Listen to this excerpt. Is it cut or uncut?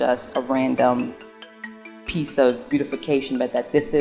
uncut